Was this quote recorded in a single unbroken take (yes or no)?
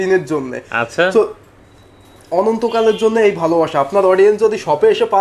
yes